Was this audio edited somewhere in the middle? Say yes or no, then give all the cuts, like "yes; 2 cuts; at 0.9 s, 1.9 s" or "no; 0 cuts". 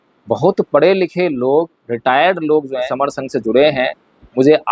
yes; 1 cut; at 2.9 s